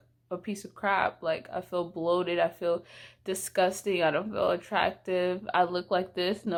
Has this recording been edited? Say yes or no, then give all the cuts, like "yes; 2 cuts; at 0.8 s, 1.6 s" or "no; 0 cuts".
no; 0 cuts